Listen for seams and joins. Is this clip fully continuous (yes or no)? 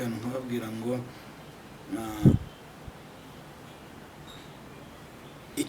yes